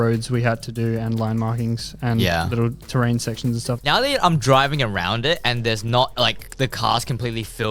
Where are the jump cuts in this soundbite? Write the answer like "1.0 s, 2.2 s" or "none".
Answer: 3.8 s